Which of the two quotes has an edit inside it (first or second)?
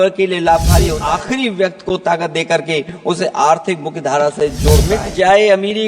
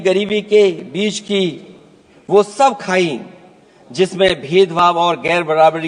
first